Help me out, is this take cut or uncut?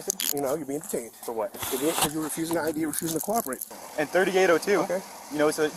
cut